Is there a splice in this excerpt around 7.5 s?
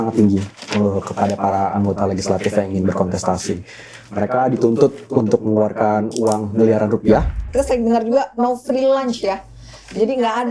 yes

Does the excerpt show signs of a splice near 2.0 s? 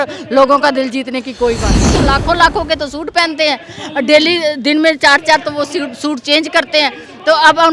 yes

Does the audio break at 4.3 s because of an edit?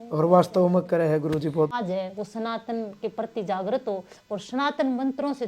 no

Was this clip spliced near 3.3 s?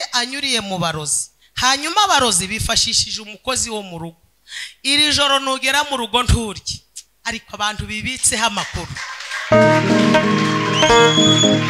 no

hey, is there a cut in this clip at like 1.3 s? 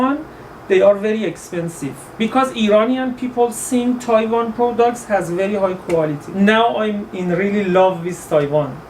no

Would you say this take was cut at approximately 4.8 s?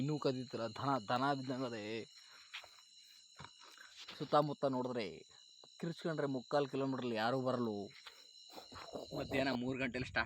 no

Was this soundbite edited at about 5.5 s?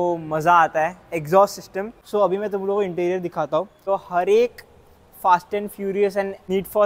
no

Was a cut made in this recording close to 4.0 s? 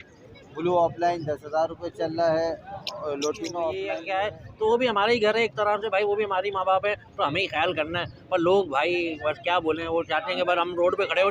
yes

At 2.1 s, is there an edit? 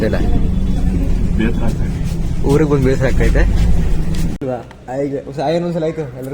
no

